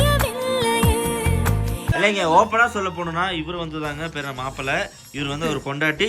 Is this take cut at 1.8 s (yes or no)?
yes